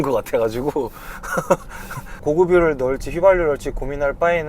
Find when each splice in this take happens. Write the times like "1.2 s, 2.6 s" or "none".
2.2 s